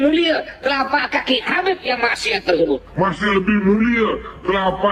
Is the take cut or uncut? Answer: cut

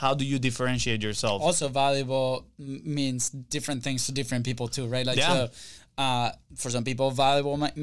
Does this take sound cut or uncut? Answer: uncut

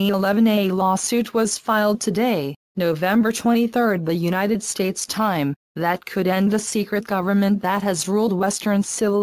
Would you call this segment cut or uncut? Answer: cut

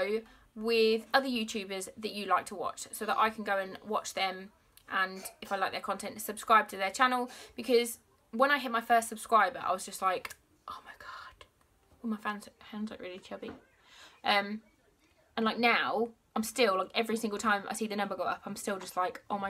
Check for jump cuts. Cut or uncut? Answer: uncut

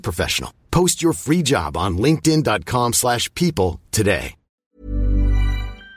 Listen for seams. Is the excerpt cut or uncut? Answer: cut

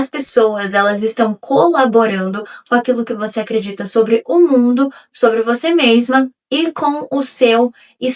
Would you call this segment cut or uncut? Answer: uncut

